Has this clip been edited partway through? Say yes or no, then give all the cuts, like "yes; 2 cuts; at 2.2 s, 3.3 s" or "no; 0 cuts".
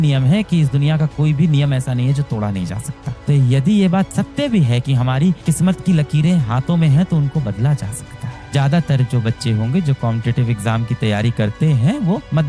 no; 0 cuts